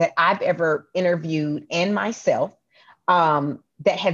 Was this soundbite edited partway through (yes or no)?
no